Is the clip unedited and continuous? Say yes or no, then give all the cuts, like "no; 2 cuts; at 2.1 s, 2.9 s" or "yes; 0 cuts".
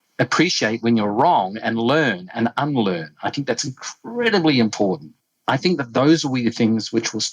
no; 1 cut; at 5.1 s